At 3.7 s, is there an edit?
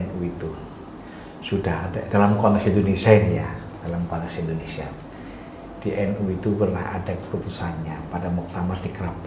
no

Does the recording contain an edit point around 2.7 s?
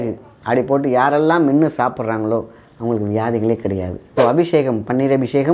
no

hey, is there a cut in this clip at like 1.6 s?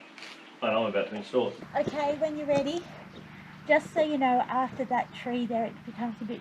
yes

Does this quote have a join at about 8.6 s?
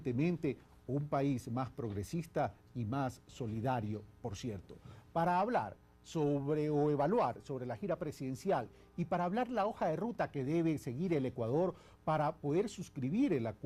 yes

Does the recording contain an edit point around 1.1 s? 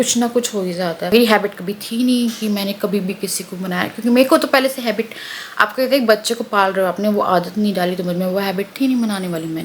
yes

